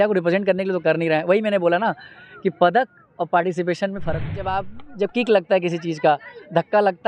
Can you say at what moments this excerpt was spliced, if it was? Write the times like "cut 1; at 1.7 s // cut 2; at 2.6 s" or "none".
cut 1; at 4.4 s